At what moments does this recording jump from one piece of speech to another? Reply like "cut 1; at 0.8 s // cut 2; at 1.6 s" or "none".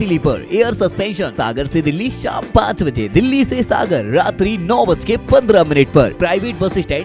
cut 1; at 1.3 s // cut 2; at 6.1 s